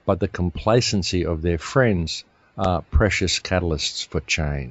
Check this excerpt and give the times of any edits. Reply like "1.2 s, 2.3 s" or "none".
none